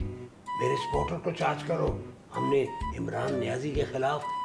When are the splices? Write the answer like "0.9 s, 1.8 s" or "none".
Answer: none